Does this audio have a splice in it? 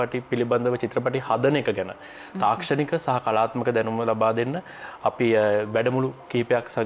no; 0 cuts

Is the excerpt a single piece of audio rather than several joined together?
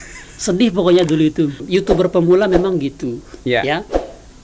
no; 1 cut; at 1.6 s

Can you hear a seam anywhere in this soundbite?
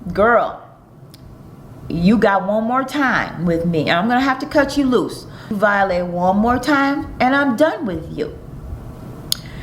yes; 1 cut; at 5.6 s

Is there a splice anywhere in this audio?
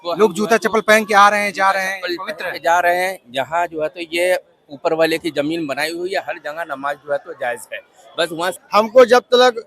yes; 1 cut; at 8.5 s

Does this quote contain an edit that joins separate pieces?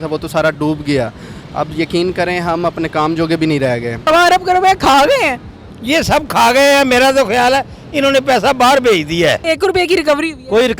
yes; 2 cuts; at 4.1 s, 9.4 s

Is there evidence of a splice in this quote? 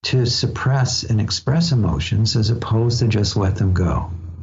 no; 0 cuts

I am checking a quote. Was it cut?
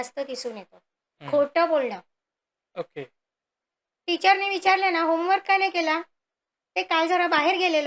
no; 0 cuts

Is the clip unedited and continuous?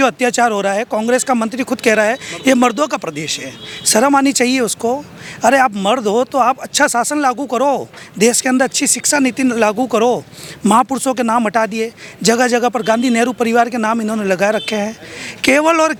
yes; 0 cuts

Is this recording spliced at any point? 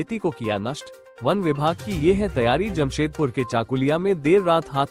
no; 0 cuts

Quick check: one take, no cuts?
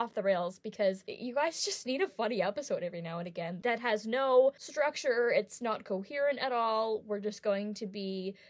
no; 3 cuts; at 1.1 s, 3.8 s, 4.6 s

